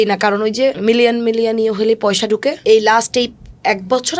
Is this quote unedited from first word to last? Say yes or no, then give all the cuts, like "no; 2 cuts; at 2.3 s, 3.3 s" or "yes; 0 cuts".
no; 2 cuts; at 0.8 s, 2.6 s